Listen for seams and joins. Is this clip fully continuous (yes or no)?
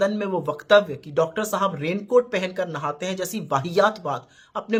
yes